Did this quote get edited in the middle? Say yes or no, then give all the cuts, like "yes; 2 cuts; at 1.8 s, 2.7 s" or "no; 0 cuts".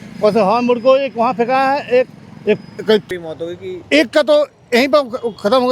yes; 1 cut; at 3.0 s